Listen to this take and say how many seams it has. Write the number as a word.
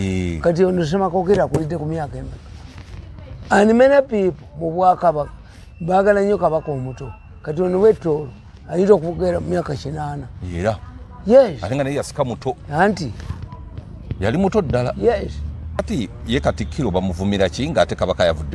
one